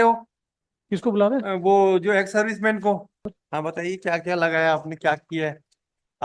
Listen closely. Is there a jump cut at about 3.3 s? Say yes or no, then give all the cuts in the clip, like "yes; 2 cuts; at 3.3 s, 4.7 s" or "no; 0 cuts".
yes; 1 cut; at 3.3 s